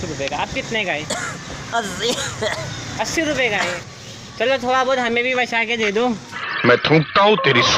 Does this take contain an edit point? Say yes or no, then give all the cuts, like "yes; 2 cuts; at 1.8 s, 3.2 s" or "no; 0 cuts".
yes; 2 cuts; at 3.8 s, 6.5 s